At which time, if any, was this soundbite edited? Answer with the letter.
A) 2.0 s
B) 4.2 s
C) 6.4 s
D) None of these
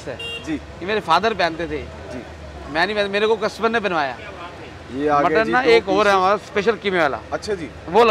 B